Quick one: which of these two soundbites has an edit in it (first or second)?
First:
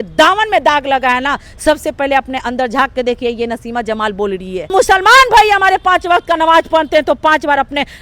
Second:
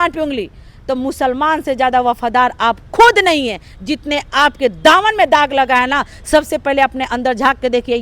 first